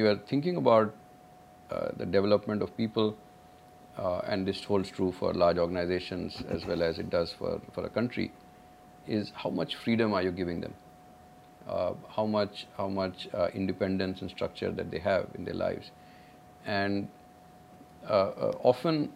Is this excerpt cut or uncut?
uncut